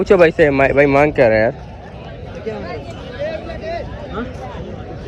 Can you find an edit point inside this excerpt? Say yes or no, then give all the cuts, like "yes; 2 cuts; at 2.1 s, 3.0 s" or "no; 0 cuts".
no; 0 cuts